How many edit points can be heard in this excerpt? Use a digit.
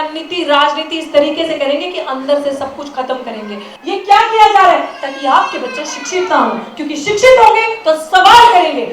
1